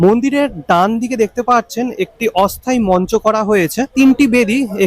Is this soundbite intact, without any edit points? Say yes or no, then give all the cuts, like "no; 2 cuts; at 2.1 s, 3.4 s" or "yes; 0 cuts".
no; 1 cut; at 3.9 s